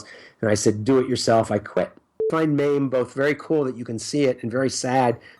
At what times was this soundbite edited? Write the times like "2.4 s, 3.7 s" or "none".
2.2 s